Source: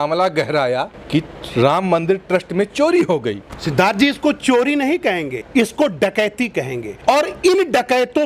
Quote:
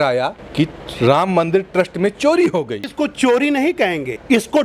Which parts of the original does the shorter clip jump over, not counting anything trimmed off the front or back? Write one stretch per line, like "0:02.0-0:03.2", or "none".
0:03.5-0:04.2